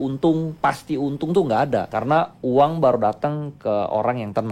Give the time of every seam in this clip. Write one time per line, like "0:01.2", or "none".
0:01.9